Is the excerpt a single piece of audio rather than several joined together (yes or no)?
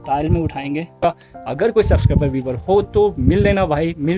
no